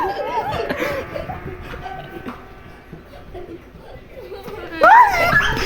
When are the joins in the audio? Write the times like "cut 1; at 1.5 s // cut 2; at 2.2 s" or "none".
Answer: cut 1; at 4.7 s

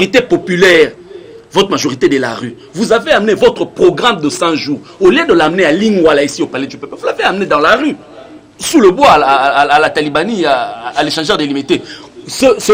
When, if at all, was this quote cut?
none

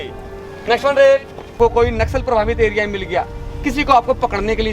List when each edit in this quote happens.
cut 1; at 1.6 s

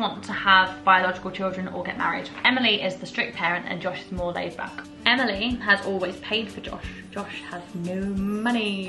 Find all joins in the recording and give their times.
cut 1; at 2.4 s // cut 2; at 4.8 s

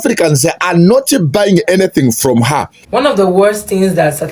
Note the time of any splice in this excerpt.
cut 1; at 2.8 s

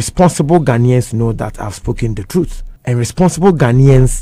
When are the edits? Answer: cut 1; at 2.7 s

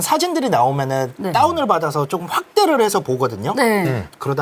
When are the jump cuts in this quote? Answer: cut 1; at 1.2 s

